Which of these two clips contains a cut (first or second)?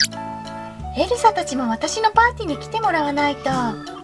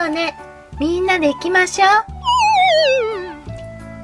first